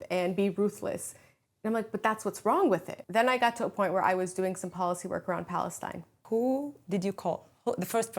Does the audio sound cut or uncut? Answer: cut